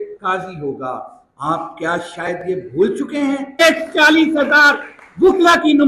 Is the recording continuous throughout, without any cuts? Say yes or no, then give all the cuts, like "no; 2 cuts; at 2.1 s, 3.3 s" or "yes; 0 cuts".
no; 1 cut; at 3.6 s